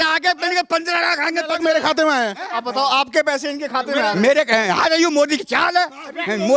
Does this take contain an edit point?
yes; 1 cut; at 1.6 s

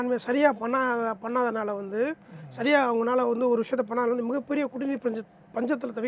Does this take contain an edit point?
no; 0 cuts

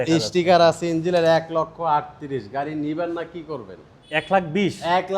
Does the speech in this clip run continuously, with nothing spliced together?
no; 1 cut; at 4.3 s

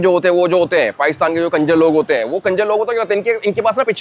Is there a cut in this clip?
no; 0 cuts

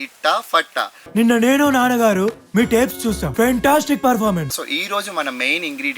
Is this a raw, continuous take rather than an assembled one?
no; 2 cuts; at 3.3 s, 4.6 s

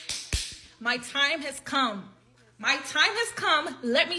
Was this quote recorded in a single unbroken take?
yes; 0 cuts

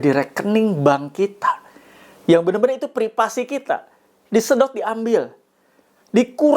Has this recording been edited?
no; 0 cuts

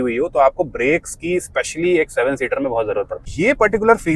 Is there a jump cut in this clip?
yes; 1 cut; at 3.2 s

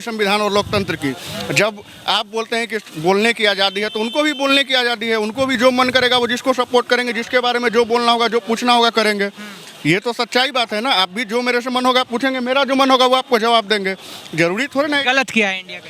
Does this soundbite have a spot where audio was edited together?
no; 0 cuts

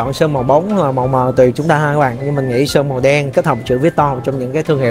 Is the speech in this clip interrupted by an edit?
no; 0 cuts

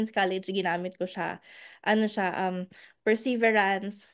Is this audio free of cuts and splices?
yes; 0 cuts

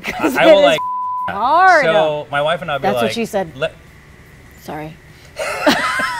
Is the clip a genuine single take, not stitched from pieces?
yes; 0 cuts

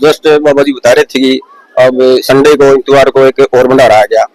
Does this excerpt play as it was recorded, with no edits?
yes; 0 cuts

